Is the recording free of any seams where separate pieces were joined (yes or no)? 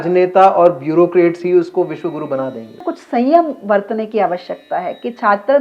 no